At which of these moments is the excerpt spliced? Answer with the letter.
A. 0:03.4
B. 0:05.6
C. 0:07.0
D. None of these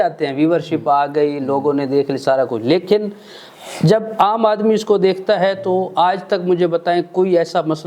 D